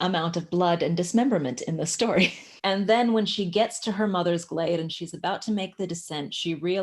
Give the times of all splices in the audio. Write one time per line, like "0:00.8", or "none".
0:02.5